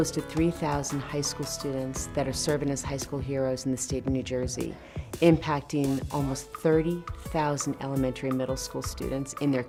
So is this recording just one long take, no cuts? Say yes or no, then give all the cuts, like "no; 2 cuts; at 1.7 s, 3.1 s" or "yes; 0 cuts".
yes; 0 cuts